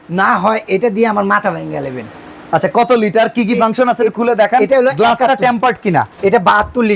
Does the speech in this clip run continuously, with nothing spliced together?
yes; 0 cuts

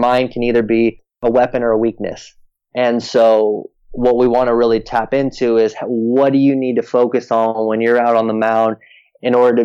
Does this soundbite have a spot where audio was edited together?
yes; 1 cut; at 1.2 s

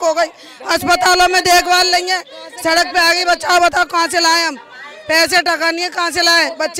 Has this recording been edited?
no; 0 cuts

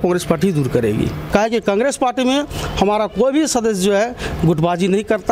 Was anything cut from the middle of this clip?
yes; 1 cut; at 1.2 s

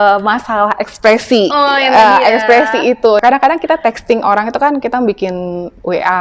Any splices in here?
yes; 1 cut; at 3.2 s

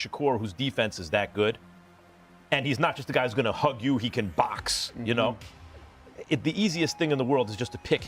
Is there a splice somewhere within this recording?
no; 0 cuts

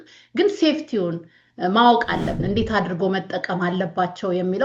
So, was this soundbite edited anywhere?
yes; 1 cut; at 2.4 s

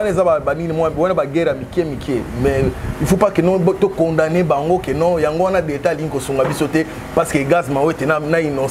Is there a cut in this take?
no; 0 cuts

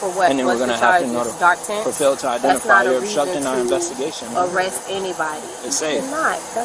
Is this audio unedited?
no; 1 cut; at 5.6 s

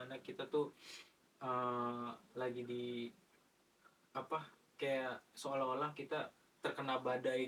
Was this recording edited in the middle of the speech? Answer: no; 0 cuts

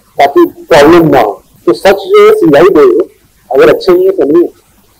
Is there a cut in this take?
no; 0 cuts

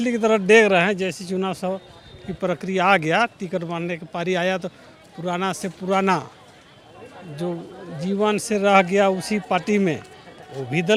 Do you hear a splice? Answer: no; 0 cuts

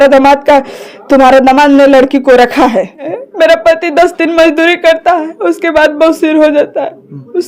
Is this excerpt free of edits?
no; 1 cut; at 3.2 s

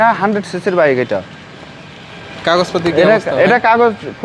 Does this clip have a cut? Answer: no; 0 cuts

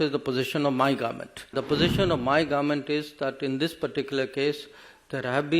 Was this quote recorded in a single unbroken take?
no; 1 cut; at 1.5 s

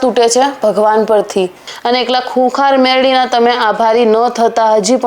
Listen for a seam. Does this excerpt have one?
yes; 1 cut; at 1.7 s

